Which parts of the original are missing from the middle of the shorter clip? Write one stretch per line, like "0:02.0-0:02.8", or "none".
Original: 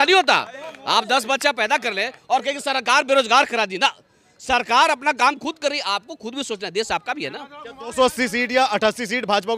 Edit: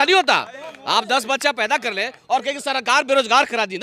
none